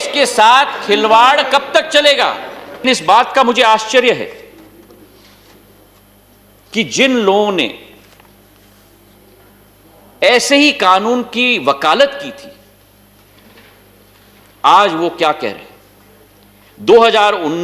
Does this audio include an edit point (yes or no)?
yes